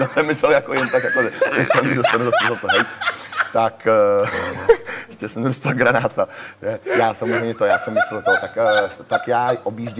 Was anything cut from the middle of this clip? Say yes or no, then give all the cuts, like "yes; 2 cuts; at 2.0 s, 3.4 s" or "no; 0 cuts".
no; 0 cuts